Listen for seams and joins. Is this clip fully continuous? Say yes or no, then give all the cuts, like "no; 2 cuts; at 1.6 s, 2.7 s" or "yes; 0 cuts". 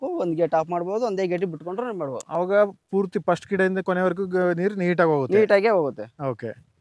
yes; 0 cuts